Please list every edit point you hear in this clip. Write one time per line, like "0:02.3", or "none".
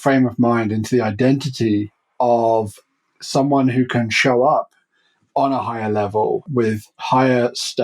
0:06.5